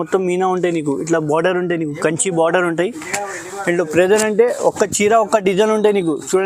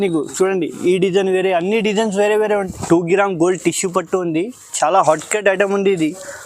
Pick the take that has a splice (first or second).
second